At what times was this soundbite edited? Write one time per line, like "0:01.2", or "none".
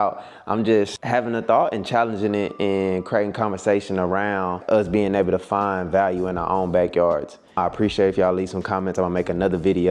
0:01.0
0:04.6
0:07.6